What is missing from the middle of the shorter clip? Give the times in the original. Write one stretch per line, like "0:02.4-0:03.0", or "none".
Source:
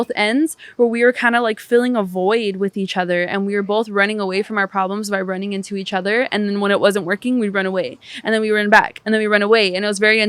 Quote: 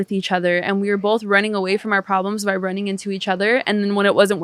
none

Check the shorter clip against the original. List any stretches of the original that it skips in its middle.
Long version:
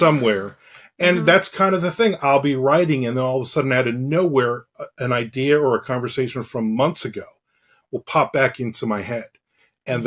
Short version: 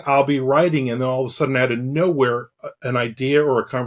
none

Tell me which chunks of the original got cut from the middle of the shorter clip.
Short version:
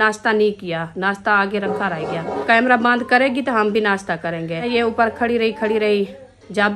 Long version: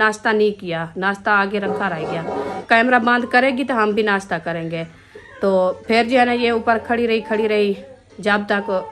0:02.4-0:02.6
0:04.9-0:06.3

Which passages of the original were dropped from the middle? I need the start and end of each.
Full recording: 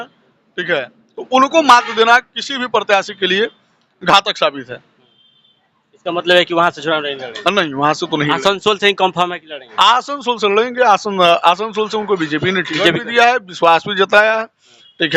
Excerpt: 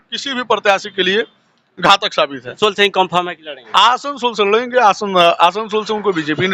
0:04.8-0:08.6

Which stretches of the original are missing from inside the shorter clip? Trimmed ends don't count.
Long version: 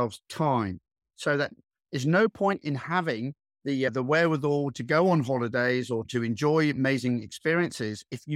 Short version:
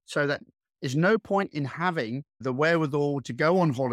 0:03.5-0:03.9

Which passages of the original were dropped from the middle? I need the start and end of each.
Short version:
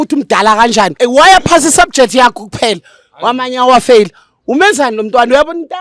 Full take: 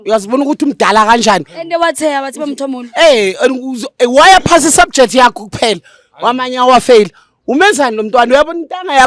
0:01.4-0:03.9

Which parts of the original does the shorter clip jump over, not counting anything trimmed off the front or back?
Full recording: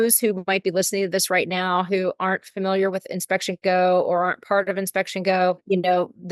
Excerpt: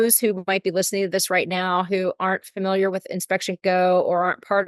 none

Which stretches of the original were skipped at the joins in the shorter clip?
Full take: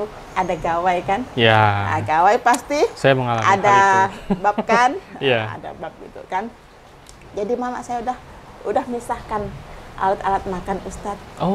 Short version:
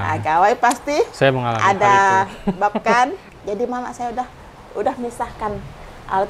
0:05.1-0:07.1

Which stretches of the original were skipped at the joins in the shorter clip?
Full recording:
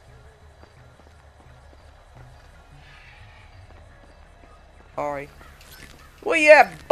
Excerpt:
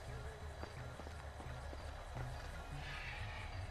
none

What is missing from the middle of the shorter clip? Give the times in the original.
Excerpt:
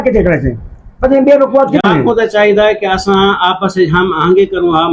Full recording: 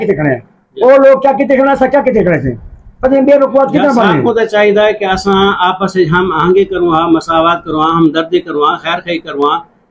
0:03.8-0:04.0

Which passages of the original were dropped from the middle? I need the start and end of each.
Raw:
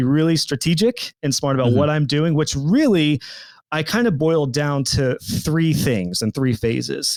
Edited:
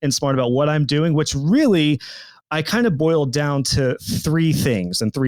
none

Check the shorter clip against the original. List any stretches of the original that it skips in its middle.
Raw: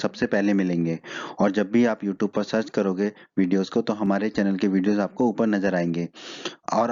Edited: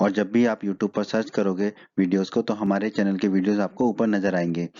none

